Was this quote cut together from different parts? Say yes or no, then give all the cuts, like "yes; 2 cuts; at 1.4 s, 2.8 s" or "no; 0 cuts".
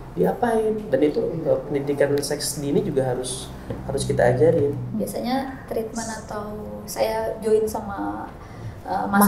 yes; 1 cut; at 4.9 s